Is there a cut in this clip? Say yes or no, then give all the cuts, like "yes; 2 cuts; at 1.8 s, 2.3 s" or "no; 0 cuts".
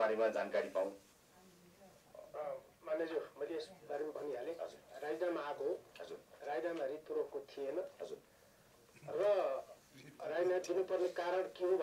no; 0 cuts